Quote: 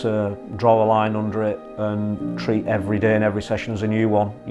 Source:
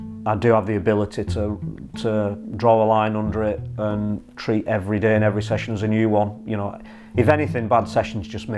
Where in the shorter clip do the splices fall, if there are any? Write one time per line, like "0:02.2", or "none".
none